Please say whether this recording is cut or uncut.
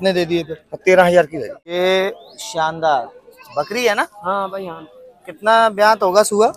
cut